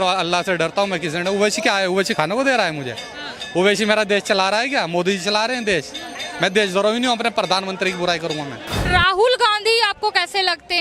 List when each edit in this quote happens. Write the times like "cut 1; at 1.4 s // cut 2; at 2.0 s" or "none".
cut 1; at 6.2 s // cut 2; at 8.8 s